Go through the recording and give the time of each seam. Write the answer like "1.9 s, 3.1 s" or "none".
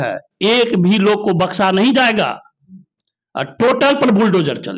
none